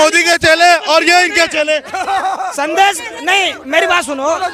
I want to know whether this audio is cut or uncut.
uncut